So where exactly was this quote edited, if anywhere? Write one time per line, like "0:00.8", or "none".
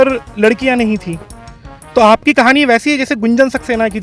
none